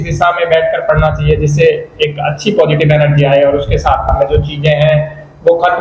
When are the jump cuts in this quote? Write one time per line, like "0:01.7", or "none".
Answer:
0:04.1